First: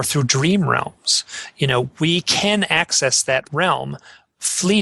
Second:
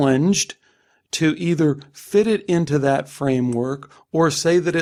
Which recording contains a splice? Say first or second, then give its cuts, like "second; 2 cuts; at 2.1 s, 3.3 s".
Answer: first; 1 cut; at 3.5 s